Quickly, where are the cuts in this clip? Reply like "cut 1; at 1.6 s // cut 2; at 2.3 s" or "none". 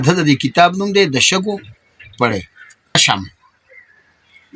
cut 1; at 2.9 s